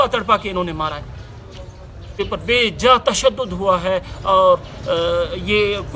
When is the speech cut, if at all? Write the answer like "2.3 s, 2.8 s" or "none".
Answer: 2.1 s